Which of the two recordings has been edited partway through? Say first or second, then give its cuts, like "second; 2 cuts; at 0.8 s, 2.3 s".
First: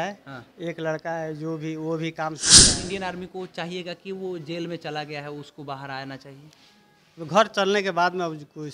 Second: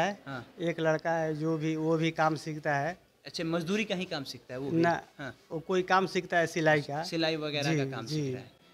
first; 1 cut; at 2.5 s